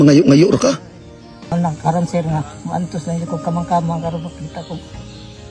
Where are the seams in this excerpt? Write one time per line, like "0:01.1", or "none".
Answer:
0:01.3